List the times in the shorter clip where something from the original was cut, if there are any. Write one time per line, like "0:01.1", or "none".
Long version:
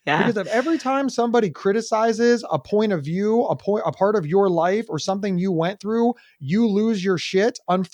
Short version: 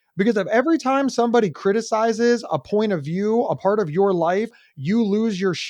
0:03.6
0:04.6